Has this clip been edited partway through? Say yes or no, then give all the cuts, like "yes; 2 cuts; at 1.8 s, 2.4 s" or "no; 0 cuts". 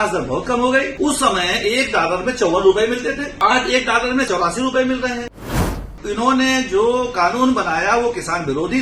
yes; 4 cuts; at 0.9 s, 3.3 s, 4.3 s, 5.9 s